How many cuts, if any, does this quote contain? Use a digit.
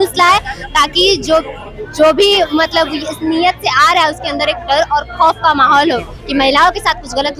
0